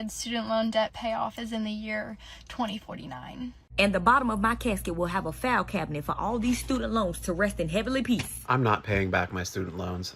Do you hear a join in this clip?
yes; 2 cuts; at 3.7 s, 8.3 s

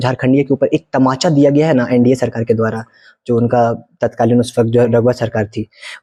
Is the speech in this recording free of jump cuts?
yes; 0 cuts

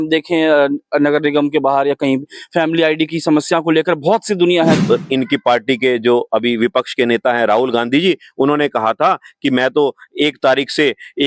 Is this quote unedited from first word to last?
no; 1 cut; at 4.8 s

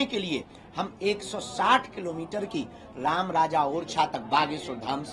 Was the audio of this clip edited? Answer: no; 0 cuts

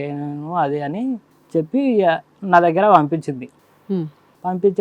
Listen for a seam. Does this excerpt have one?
yes; 1 cut; at 1.3 s

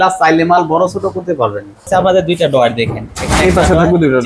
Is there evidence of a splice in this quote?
yes; 1 cut; at 1.9 s

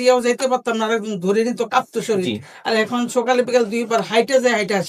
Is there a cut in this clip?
no; 0 cuts

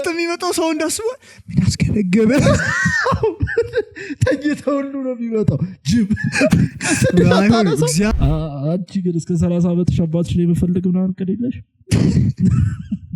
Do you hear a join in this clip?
yes; 1 cut; at 8.1 s

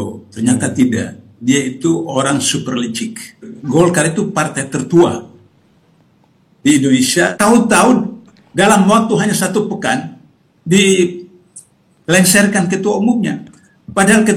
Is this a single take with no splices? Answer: no; 2 cuts; at 3.5 s, 7.3 s

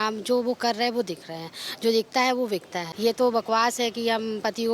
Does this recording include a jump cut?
yes; 1 cut; at 2.8 s

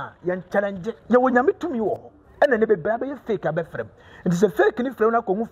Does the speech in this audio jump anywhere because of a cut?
yes; 1 cut; at 0.9 s

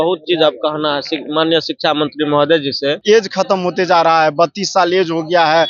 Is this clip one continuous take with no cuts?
no; 1 cut; at 3.0 s

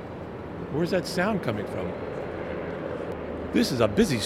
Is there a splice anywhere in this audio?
yes; 1 cut; at 3.2 s

